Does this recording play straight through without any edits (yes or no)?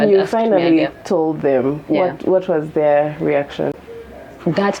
no